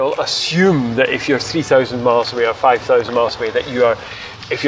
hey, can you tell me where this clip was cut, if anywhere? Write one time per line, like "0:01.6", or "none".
none